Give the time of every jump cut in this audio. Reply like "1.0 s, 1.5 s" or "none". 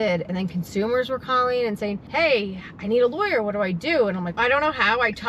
2.0 s, 4.4 s